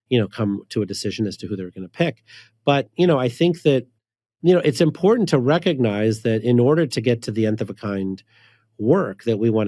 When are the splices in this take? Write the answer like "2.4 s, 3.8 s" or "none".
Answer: none